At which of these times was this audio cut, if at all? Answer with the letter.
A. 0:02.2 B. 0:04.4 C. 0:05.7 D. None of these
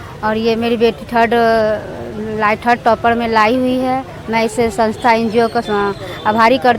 C